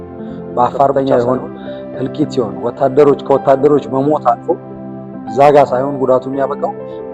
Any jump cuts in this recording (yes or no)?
yes